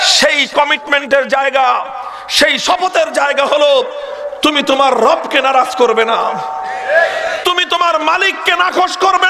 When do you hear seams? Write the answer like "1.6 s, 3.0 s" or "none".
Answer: none